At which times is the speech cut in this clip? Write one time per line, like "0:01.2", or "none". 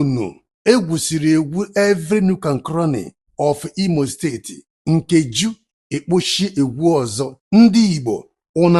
0:07.3